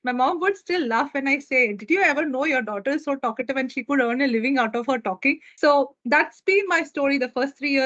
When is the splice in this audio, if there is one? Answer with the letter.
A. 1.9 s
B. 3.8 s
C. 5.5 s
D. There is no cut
C